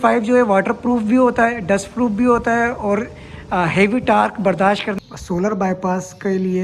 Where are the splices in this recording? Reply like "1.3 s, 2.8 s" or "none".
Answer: 5.0 s